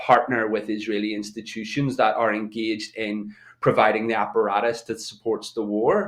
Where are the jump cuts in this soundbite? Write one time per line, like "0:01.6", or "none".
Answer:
none